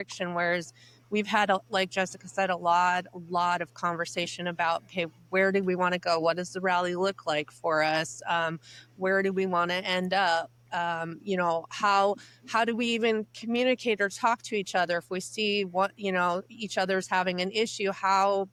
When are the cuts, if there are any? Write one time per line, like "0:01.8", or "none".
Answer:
none